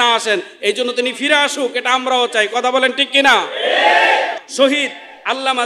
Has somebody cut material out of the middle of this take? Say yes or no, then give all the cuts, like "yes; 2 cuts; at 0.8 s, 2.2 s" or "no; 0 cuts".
yes; 1 cut; at 4.4 s